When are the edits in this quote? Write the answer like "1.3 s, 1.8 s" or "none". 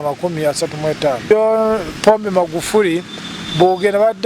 1.3 s